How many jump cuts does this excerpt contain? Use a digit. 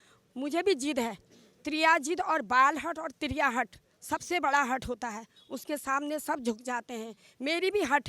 0